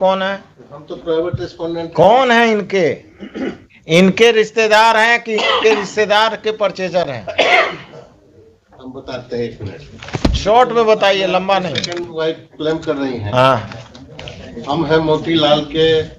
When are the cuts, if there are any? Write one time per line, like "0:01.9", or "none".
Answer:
none